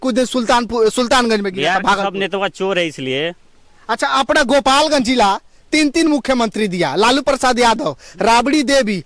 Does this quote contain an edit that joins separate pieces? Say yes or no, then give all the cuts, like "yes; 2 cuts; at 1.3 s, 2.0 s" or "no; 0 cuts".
no; 0 cuts